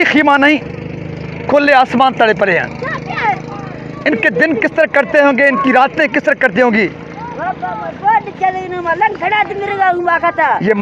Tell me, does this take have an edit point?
no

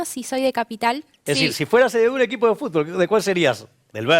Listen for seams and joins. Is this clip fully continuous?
no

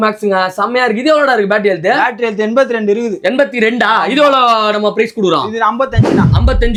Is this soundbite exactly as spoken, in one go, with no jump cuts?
yes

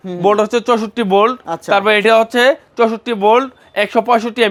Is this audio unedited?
yes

